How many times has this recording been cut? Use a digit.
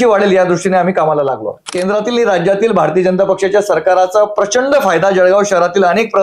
1